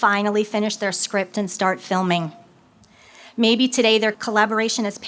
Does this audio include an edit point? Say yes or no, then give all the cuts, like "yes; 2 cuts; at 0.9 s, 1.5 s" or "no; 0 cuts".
yes; 1 cut; at 4.2 s